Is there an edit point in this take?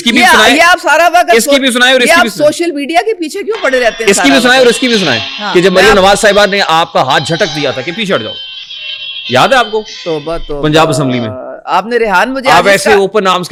no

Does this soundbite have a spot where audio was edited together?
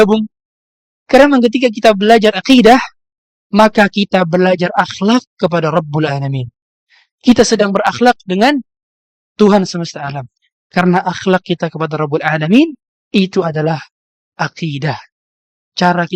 no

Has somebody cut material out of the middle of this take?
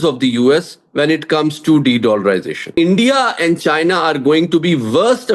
yes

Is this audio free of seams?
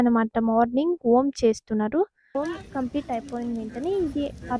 no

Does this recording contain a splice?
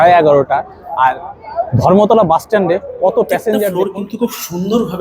yes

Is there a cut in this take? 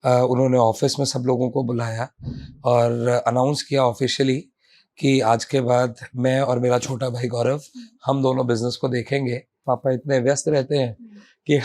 yes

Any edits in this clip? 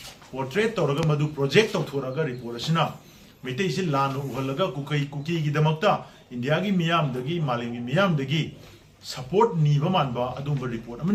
no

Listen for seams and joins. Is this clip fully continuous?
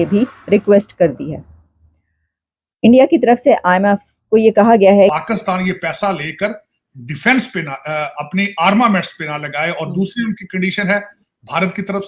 no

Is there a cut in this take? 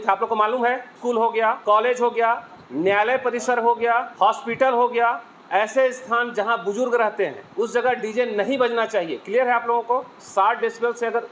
yes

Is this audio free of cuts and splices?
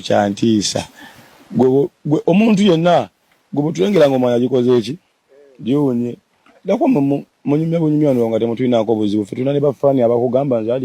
yes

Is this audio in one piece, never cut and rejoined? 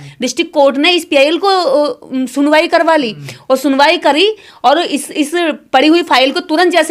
yes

